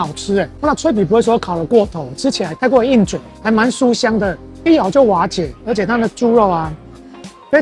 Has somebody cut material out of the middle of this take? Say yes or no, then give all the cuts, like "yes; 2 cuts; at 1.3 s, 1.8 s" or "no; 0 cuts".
no; 0 cuts